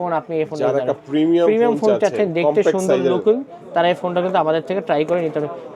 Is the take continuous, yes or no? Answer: yes